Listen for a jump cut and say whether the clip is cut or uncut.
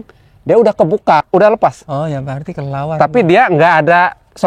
cut